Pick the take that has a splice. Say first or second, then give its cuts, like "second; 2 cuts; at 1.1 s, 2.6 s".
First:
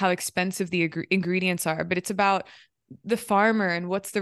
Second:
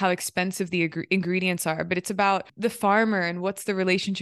second; 1 cut; at 2.5 s